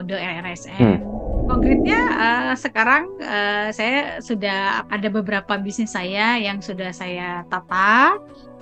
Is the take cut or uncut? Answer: cut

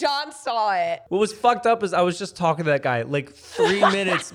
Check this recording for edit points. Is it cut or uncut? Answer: cut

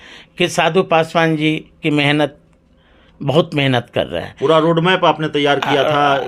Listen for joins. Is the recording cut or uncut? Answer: uncut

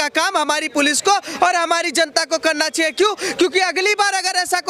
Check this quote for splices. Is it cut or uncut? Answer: uncut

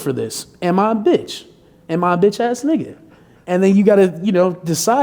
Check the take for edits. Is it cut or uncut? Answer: uncut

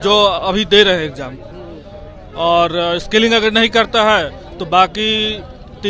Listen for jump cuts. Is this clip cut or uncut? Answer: uncut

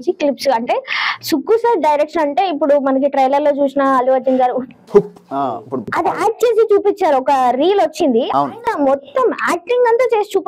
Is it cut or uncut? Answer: cut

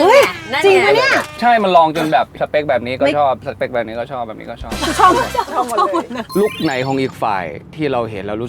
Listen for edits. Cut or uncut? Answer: cut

